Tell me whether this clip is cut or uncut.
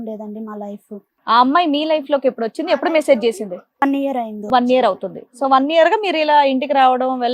cut